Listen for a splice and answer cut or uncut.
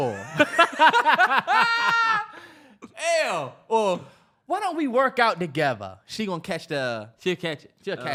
uncut